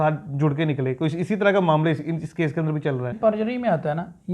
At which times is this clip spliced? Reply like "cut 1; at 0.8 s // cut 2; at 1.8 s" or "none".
cut 1; at 3.1 s